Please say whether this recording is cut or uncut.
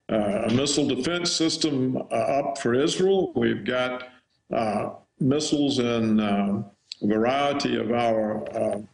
uncut